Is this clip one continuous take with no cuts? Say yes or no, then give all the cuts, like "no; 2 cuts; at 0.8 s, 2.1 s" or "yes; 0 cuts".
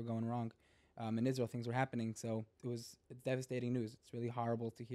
no; 1 cut; at 2.5 s